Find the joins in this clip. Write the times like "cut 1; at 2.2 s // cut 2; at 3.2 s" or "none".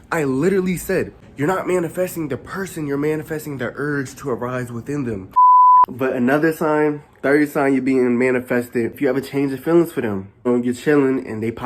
cut 1; at 1.2 s // cut 2; at 5.4 s // cut 3; at 8.9 s // cut 4; at 10.5 s

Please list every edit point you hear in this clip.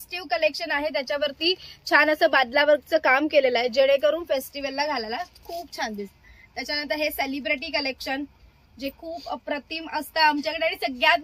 none

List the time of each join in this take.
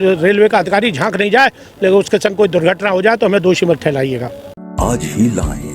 none

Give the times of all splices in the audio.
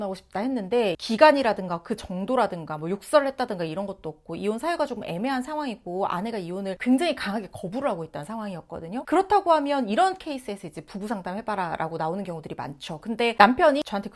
cut 1; at 1.0 s

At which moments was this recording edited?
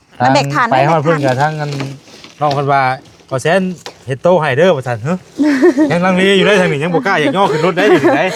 none

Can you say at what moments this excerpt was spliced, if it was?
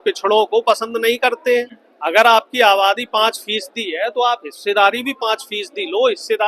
cut 1; at 1.7 s

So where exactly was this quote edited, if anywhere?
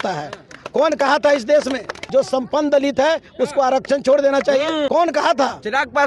cut 1; at 2.0 s // cut 2; at 4.9 s

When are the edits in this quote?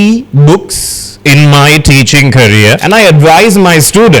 cut 1; at 2.8 s

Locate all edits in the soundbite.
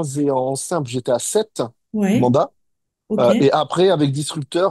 none

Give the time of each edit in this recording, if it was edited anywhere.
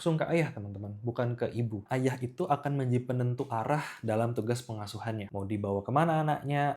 cut 1; at 1.9 s

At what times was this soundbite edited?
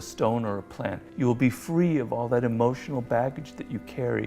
cut 1; at 1.0 s

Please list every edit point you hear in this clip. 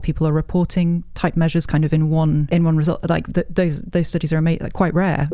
cut 1; at 2.4 s

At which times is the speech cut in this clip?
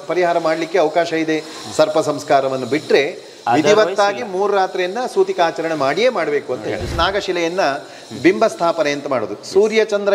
cut 1; at 6.9 s

